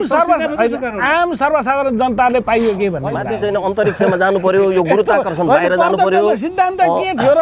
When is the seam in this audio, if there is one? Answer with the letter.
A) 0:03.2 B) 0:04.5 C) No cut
A